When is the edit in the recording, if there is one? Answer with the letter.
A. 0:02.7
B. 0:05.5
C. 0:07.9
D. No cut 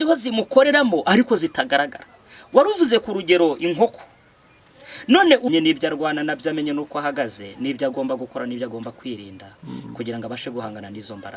B